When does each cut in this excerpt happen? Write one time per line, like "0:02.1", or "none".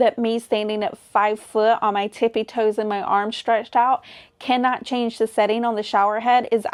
none